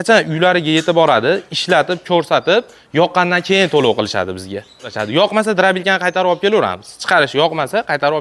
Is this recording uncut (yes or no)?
no